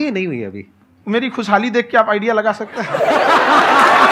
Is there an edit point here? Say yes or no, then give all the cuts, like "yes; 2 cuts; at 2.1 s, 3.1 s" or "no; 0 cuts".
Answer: no; 0 cuts